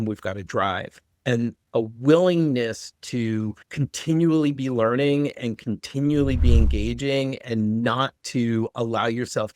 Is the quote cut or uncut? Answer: cut